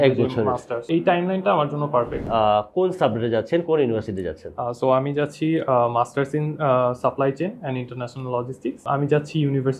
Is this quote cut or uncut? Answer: cut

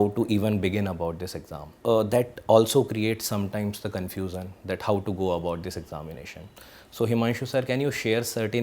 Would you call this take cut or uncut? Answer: cut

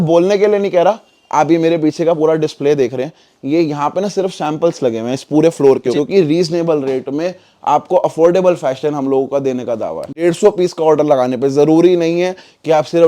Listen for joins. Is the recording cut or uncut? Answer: cut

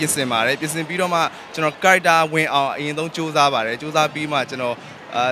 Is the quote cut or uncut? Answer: cut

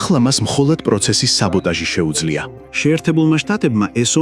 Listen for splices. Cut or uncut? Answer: cut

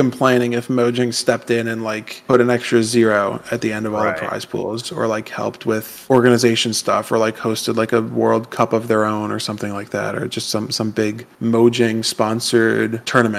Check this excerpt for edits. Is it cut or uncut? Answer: uncut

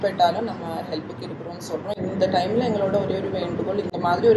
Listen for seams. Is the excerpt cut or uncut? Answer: uncut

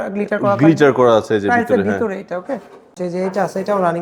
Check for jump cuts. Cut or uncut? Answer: cut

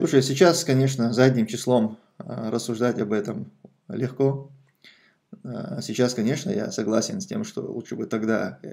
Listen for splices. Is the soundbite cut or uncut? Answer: uncut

